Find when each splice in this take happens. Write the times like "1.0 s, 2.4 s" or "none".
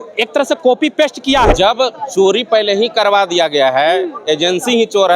1.5 s